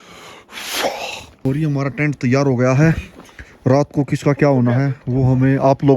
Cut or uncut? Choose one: uncut